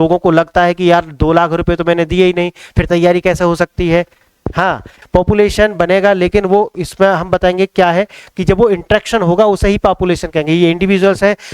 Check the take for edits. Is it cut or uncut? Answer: cut